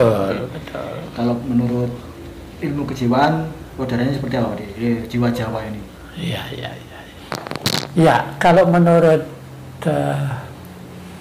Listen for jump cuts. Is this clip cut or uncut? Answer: uncut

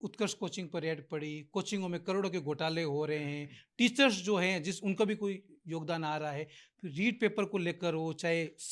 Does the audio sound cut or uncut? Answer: uncut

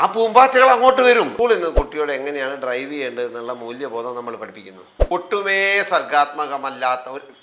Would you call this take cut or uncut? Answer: cut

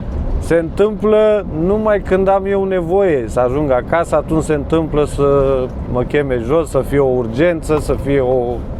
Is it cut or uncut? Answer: uncut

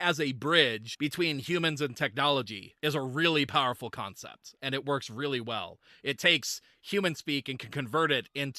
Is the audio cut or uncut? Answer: cut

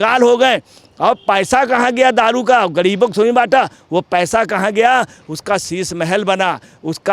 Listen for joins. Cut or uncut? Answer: uncut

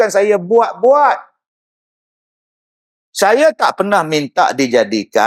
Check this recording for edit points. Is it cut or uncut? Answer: uncut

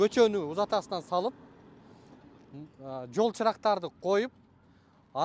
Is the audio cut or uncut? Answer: uncut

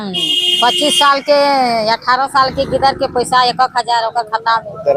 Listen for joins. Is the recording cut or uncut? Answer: uncut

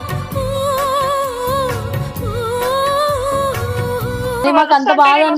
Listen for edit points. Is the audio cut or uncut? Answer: uncut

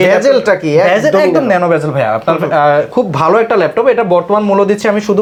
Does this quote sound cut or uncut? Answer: uncut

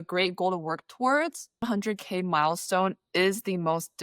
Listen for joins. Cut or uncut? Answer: cut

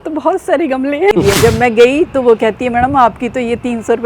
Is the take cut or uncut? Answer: cut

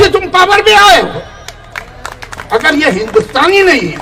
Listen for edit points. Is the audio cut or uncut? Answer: uncut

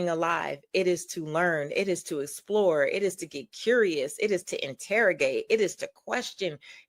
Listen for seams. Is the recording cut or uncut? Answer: uncut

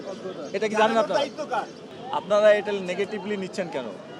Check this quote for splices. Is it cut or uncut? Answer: cut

